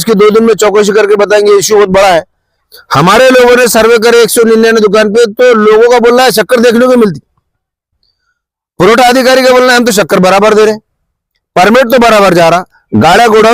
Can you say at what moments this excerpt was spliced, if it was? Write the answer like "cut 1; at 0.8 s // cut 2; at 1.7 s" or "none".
cut 1; at 2.5 s